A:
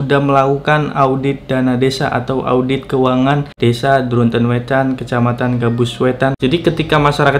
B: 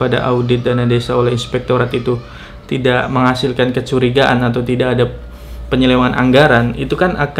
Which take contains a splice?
A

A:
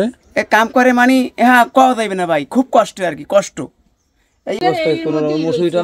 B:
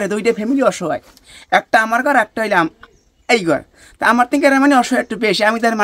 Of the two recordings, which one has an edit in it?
A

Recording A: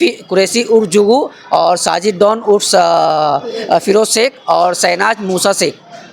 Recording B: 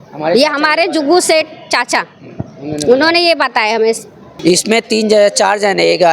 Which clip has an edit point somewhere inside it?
B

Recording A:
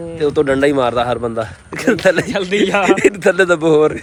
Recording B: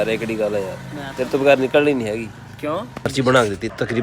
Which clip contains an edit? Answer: B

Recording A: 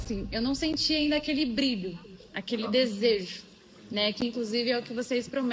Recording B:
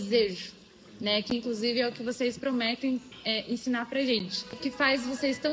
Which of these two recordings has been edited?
B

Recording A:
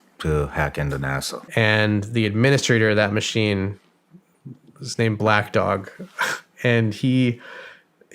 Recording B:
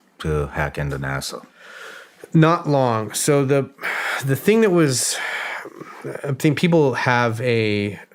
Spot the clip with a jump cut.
A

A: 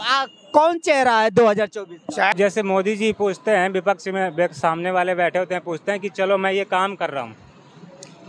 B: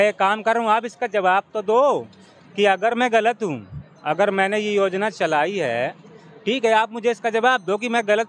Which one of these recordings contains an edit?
A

